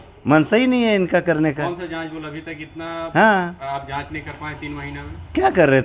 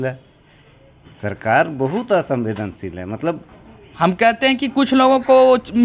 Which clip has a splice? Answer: second; 1 cut; at 3.4 s

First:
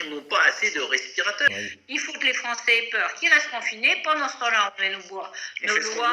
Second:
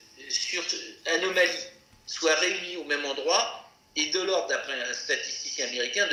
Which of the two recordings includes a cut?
first; 1 cut; at 1.5 s

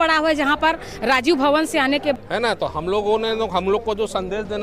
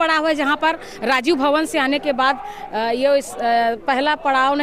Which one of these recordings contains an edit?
first; 1 cut; at 2.2 s

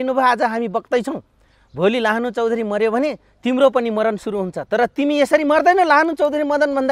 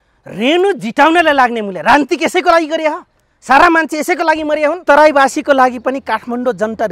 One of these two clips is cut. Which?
second; 1 cut; at 4.8 s

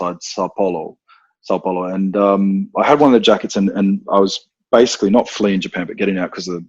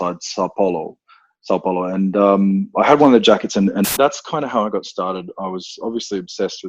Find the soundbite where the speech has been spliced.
second; 1 cut; at 3.8 s

